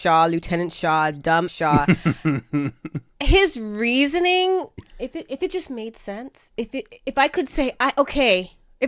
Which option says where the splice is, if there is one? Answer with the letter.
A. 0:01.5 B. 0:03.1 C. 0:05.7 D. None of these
A